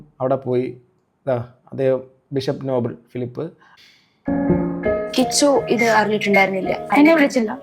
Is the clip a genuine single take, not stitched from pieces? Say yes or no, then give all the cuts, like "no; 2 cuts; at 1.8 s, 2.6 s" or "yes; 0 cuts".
no; 1 cut; at 3.7 s